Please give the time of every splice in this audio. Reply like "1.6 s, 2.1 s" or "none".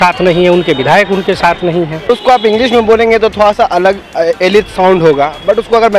2.1 s